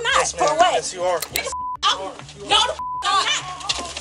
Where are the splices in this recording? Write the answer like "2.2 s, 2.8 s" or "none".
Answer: 1.3 s